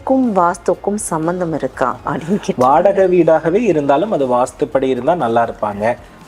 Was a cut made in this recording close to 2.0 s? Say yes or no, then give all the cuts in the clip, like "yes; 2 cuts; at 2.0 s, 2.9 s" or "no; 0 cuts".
no; 0 cuts